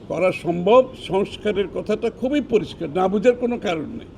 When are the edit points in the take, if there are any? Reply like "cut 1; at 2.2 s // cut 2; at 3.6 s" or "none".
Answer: cut 1; at 1.0 s